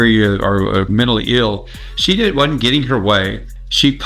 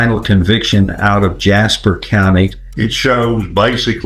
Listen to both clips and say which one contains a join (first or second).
second